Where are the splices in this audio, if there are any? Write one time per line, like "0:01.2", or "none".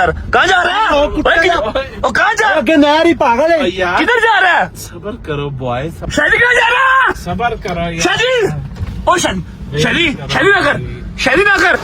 0:06.0